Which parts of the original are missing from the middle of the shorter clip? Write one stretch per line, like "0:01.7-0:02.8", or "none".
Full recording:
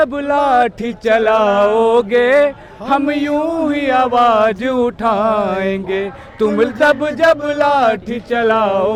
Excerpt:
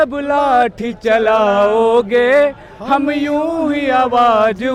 none